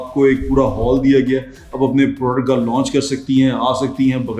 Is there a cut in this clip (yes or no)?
no